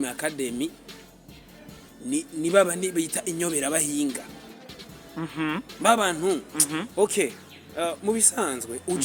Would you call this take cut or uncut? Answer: uncut